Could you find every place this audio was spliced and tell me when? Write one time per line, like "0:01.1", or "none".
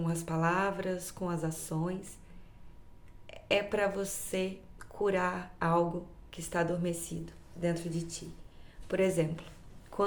none